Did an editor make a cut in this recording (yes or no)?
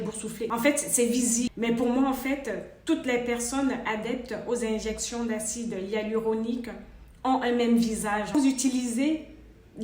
yes